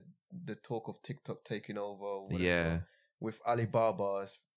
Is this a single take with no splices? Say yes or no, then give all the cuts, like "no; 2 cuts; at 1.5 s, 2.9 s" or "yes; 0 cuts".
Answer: yes; 0 cuts